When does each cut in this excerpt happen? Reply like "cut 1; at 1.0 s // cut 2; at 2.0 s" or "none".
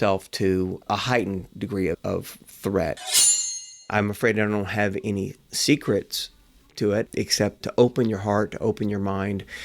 cut 1; at 0.9 s // cut 2; at 2.0 s // cut 3; at 3.3 s // cut 4; at 7.2 s

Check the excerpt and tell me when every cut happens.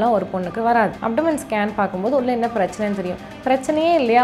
cut 1; at 1.0 s

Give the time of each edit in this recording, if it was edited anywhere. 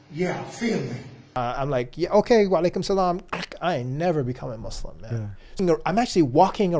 cut 1; at 1.2 s // cut 2; at 5.5 s

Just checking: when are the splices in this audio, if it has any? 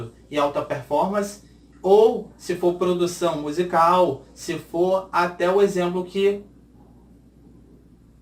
none

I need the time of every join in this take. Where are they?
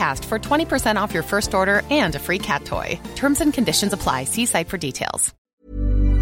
cut 1; at 5.3 s

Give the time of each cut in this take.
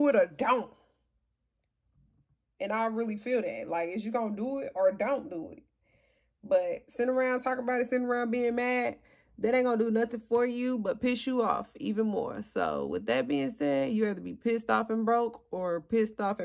none

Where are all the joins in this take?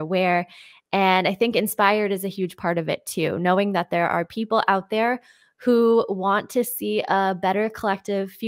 none

